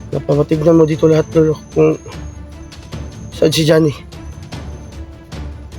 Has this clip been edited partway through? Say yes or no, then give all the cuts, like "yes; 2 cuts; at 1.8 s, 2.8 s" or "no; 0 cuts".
yes; 3 cuts; at 2.1 s, 3.3 s, 4.6 s